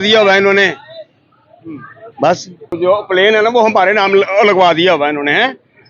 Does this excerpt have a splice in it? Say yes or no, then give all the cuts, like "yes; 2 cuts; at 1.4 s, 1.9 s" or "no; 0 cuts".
yes; 1 cut; at 2.8 s